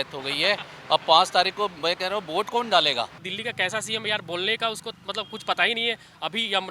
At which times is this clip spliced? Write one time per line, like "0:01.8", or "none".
0:03.2